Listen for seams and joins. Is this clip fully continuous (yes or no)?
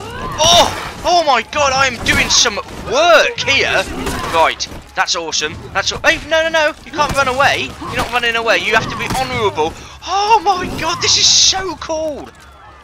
yes